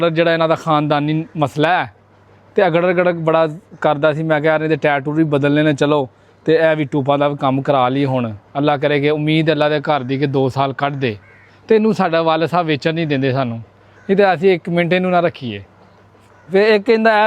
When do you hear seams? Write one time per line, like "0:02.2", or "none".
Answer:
none